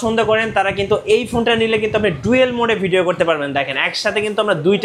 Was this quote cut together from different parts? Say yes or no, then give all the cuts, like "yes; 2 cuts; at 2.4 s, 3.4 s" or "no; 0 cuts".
no; 0 cuts